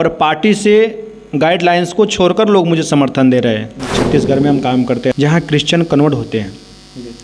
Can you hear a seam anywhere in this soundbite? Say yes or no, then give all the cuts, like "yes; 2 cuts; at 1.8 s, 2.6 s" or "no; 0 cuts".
yes; 2 cuts; at 4.0 s, 5.1 s